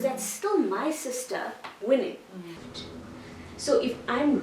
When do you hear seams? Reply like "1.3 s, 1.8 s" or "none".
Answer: 2.6 s